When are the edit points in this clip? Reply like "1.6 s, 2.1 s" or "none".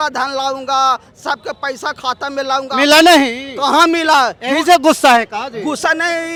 none

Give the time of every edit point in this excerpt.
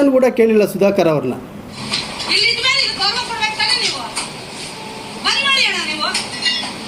1.8 s

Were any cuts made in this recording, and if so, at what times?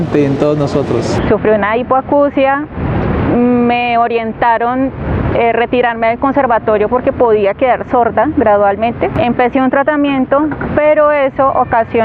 1.1 s

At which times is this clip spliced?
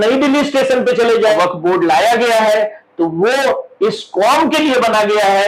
1.4 s

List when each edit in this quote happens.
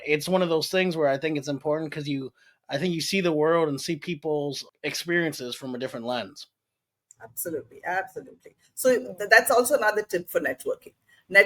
4.7 s

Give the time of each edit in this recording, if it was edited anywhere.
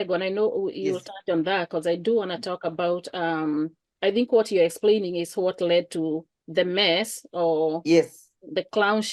none

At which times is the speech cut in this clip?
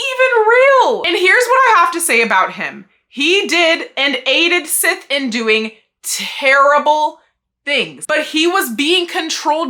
1.0 s, 8.0 s

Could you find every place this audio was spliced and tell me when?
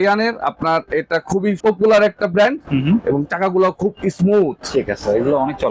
1.6 s

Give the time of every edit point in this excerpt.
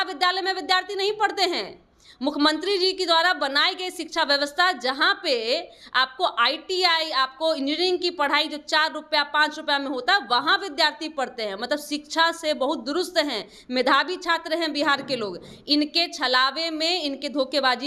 none

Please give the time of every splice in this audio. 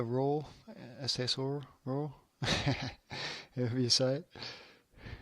1.6 s

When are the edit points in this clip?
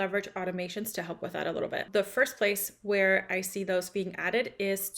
1.8 s

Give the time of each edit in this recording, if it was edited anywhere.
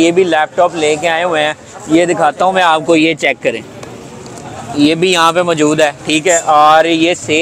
none

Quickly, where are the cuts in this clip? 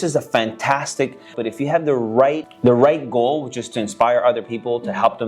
1.3 s, 2.5 s

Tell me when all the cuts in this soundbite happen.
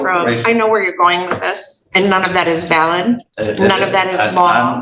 3.3 s

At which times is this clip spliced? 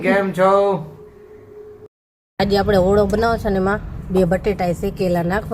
1.9 s

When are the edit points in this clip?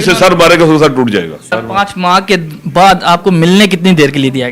1.5 s

